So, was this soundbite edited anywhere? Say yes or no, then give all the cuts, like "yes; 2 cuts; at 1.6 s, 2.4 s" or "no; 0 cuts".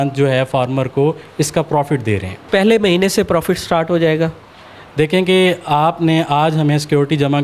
no; 0 cuts